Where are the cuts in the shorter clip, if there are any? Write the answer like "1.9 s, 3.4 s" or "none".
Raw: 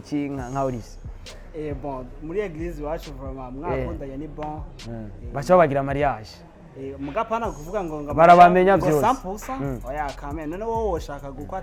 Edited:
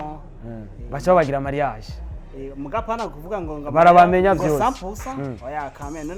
none